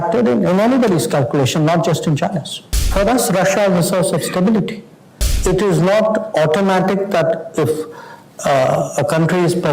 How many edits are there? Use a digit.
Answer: 1